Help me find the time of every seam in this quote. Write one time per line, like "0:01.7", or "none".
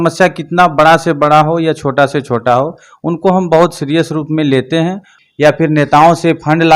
0:05.1